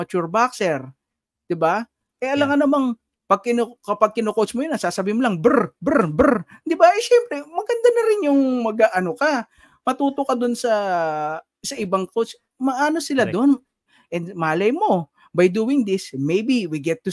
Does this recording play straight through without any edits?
no; 1 cut; at 13.9 s

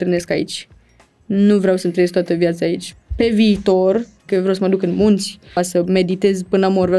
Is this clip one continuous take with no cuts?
no; 3 cuts; at 2.9 s, 4.3 s, 5.6 s

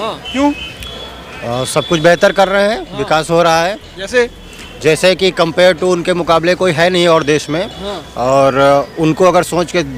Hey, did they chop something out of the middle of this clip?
no; 0 cuts

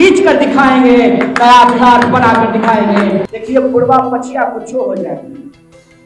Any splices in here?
yes; 1 cut; at 3.3 s

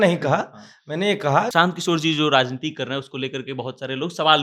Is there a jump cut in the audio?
yes; 1 cut; at 1.5 s

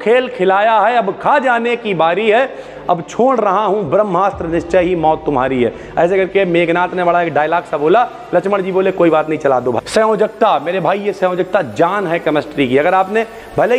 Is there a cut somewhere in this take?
yes; 1 cut; at 9.8 s

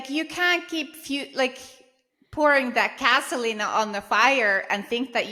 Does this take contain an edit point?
no; 0 cuts

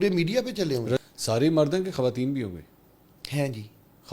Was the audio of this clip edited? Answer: yes; 1 cut; at 1.0 s

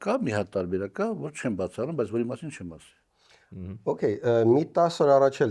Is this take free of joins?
yes; 0 cuts

